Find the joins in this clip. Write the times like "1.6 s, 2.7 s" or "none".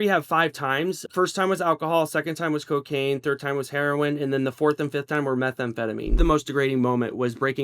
1.0 s, 6.2 s

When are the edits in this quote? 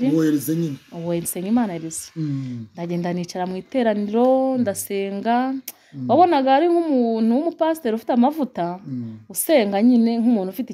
none

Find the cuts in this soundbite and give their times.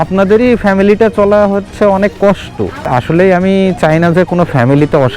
2.9 s

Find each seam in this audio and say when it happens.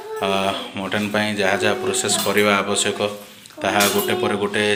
none

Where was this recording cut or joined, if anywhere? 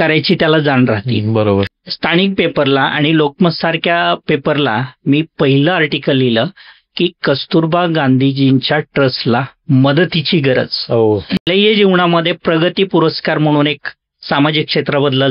1.8 s, 11.4 s

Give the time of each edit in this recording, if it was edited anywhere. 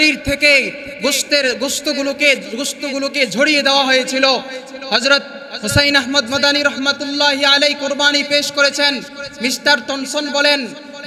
none

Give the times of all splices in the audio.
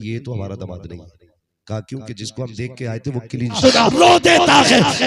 3.6 s

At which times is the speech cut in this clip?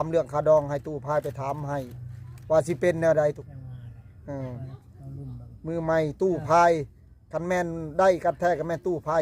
3.4 s

